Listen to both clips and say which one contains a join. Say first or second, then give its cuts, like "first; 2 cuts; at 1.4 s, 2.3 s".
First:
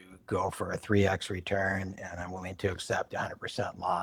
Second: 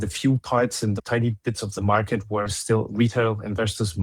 second; 1 cut; at 1.0 s